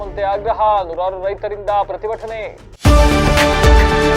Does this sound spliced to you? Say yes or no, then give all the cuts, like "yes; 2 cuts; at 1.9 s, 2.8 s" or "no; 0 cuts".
yes; 1 cut; at 2.6 s